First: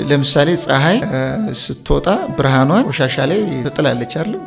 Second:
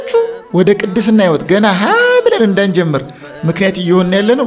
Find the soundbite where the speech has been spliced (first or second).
first